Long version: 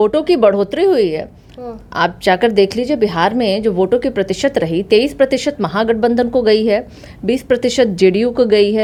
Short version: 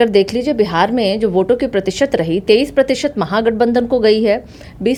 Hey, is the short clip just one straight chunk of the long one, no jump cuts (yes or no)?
yes